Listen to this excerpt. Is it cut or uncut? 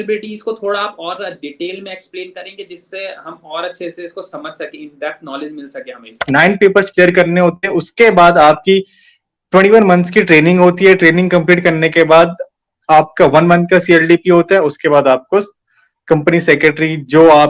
cut